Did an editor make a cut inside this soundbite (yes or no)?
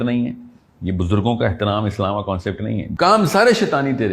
yes